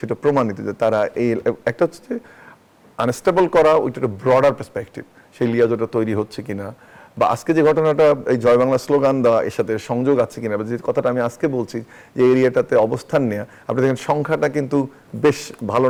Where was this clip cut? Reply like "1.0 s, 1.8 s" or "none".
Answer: none